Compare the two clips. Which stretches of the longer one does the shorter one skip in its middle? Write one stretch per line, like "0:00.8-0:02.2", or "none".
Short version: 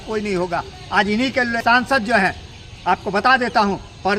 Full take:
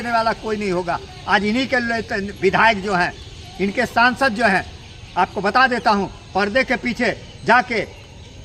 0:02.0-0:03.9